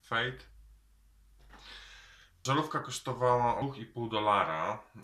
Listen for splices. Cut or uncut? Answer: cut